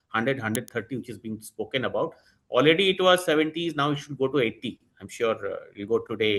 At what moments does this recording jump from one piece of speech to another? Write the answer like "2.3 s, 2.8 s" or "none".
none